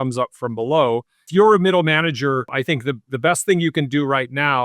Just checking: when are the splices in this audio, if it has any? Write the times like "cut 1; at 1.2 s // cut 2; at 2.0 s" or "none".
cut 1; at 1.3 s // cut 2; at 2.5 s